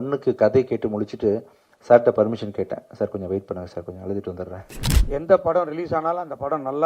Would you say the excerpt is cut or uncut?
cut